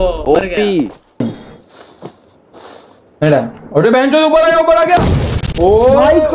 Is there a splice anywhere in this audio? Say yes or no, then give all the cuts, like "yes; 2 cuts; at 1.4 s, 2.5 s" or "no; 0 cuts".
yes; 1 cut; at 1.2 s